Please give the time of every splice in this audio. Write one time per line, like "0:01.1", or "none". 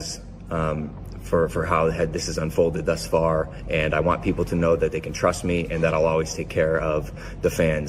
none